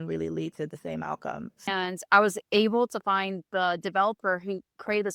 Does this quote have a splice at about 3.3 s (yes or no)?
no